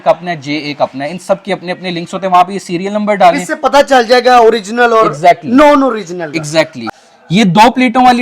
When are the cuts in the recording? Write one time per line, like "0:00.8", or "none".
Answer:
0:06.9